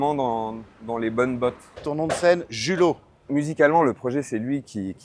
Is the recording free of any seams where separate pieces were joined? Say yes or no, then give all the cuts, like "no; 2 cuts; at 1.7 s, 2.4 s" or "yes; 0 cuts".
no; 2 cuts; at 1.8 s, 3.3 s